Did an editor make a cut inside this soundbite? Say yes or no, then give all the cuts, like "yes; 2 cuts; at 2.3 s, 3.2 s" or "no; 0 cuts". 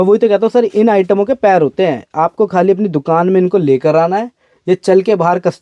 no; 0 cuts